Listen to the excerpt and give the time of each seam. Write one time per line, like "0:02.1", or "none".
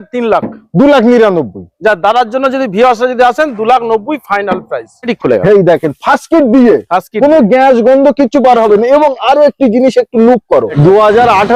0:05.1
0:10.7